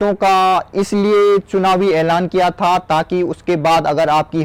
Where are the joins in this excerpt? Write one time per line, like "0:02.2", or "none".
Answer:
none